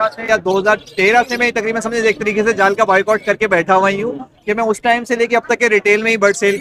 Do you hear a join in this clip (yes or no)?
no